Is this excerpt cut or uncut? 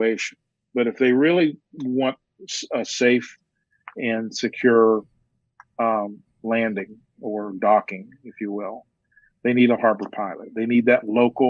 uncut